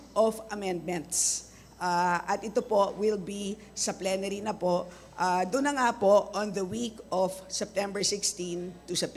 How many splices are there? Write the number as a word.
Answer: zero